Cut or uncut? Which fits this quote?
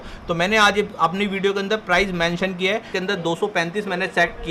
cut